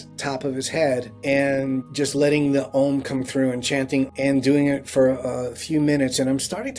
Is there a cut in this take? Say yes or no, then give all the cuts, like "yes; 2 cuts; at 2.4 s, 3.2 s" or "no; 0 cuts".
yes; 3 cuts; at 1.1 s, 1.9 s, 4.1 s